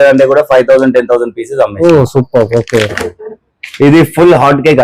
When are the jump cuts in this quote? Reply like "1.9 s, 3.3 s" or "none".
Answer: none

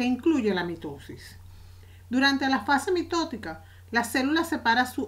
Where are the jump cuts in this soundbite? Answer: 2.6 s

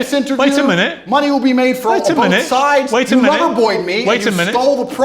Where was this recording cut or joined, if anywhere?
2.5 s

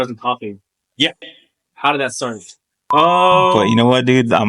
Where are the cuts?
3.5 s

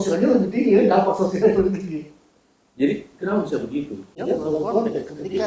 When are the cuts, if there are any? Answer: 4.2 s

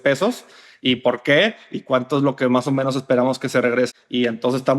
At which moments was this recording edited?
3.9 s

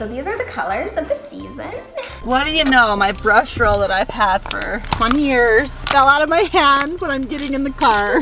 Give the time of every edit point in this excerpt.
2.1 s, 4.8 s, 5.8 s

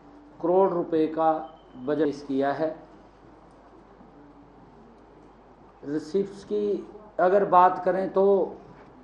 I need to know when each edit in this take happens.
2.1 s

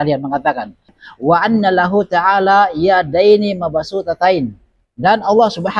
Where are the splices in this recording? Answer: 1.0 s

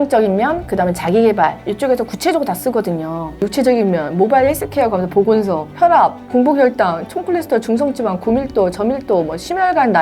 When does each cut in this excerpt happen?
3.5 s, 6.0 s

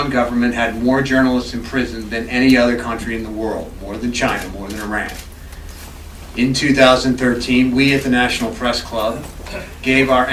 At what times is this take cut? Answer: none

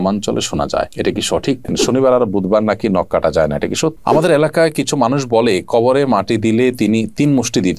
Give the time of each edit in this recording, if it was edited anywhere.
1.7 s, 4.0 s

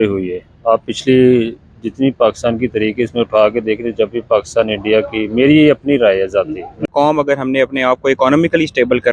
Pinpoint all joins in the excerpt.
6.9 s

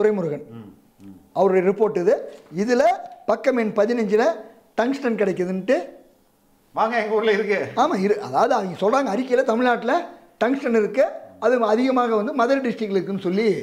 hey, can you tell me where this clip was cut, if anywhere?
none

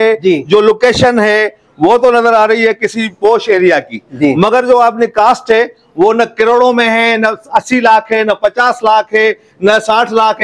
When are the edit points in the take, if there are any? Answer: none

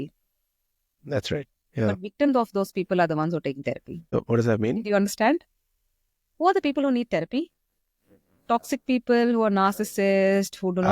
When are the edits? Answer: none

